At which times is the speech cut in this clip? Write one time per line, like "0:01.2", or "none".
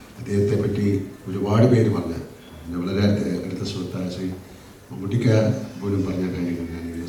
none